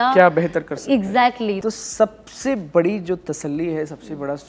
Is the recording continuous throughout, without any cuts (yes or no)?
no